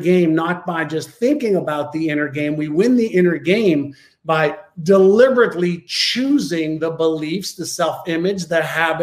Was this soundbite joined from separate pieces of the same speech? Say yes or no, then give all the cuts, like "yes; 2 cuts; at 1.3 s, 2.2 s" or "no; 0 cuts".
no; 0 cuts